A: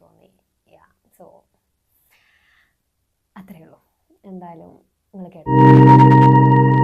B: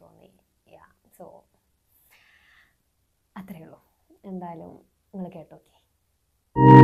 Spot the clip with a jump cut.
A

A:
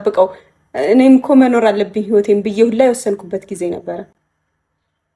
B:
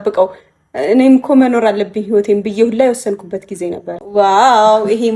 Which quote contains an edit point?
B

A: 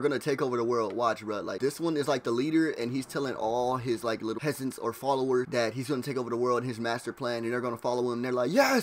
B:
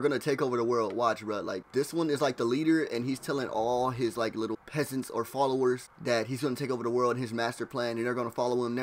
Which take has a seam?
A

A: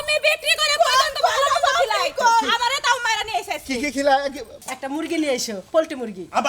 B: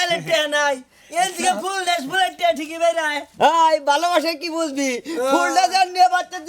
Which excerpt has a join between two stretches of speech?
A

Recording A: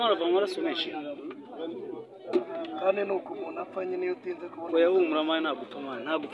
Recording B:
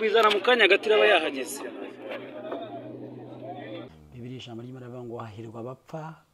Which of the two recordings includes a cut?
B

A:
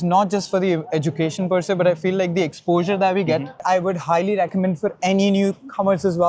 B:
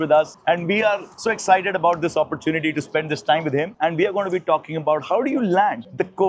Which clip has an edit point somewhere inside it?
A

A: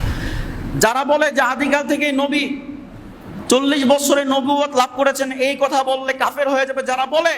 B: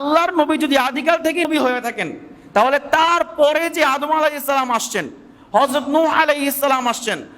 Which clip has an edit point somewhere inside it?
B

